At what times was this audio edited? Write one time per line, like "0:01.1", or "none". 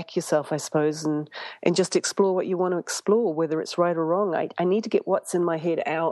none